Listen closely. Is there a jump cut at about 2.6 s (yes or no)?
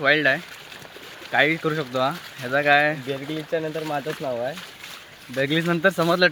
no